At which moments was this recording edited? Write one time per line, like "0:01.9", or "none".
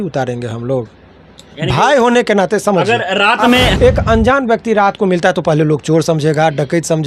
0:03.7

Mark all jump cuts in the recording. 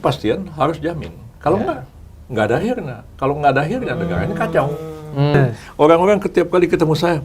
0:05.3

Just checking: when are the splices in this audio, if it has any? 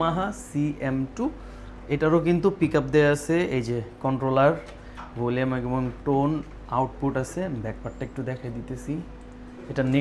none

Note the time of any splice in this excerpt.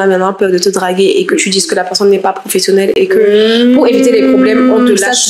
none

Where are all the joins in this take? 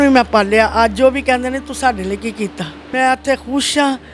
0:02.8

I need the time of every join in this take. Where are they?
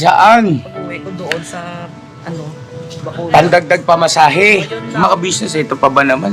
0:05.0

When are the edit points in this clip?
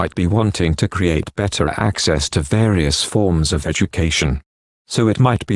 none

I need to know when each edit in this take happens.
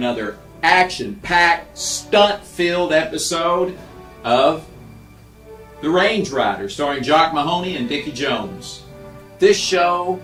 none

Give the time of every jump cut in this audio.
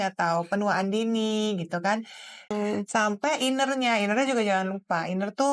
0:02.5

